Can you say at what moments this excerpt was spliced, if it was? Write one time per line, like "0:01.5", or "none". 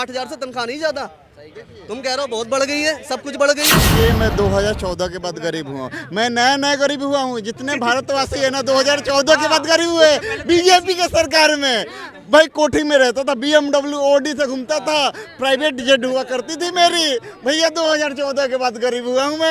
0:03.9